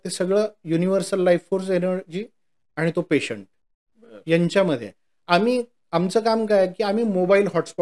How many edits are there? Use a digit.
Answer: 0